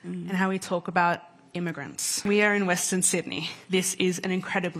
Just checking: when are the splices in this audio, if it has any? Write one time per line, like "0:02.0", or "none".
0:02.1
0:03.5